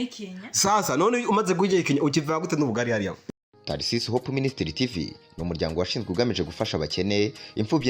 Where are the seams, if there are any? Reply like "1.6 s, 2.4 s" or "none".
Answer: 3.2 s